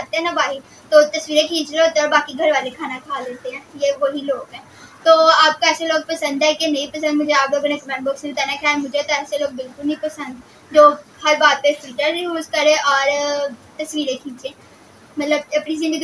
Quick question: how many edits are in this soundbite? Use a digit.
0